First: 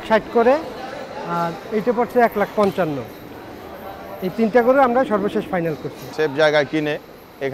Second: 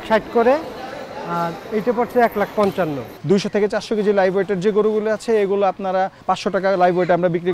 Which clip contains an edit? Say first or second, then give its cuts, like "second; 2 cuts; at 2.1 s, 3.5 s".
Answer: second; 2 cuts; at 3.1 s, 6.2 s